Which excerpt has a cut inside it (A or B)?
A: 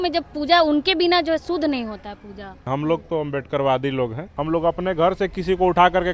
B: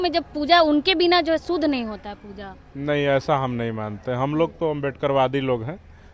A